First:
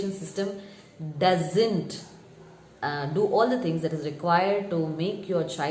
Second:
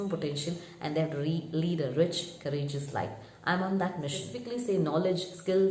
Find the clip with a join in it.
second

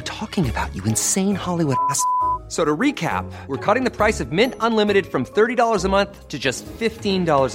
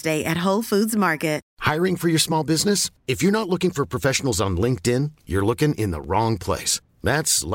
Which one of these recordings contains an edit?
second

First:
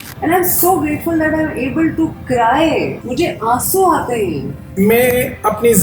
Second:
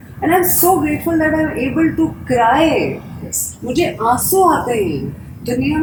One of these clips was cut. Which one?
first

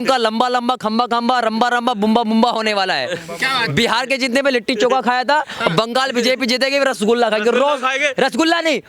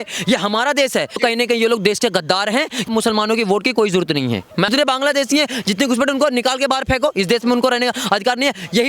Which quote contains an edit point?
second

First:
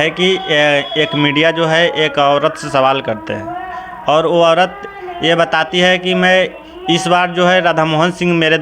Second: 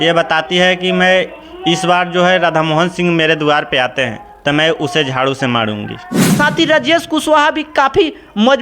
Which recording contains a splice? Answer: second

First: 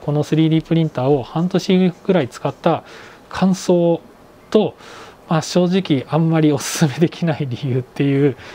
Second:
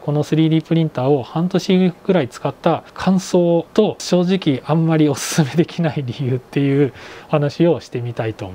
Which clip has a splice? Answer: second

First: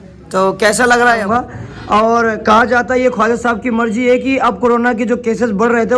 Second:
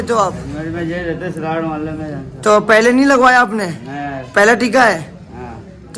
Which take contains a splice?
first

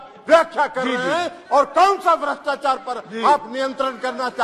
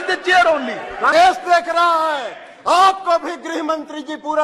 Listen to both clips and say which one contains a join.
second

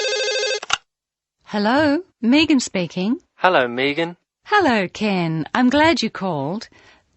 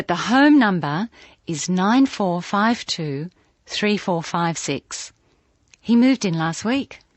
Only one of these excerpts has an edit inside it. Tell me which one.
first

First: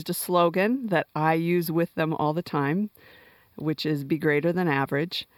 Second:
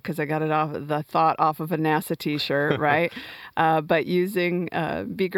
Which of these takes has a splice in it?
first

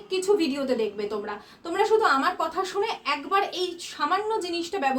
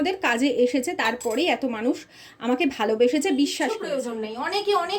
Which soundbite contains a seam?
second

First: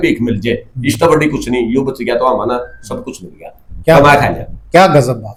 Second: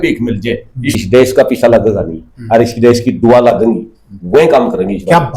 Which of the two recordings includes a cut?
second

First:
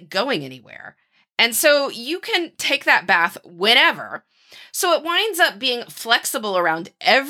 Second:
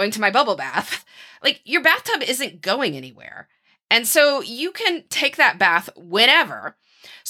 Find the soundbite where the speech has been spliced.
second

